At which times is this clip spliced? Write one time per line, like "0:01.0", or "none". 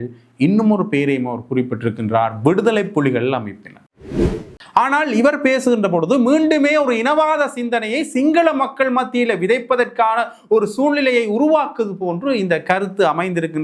0:04.0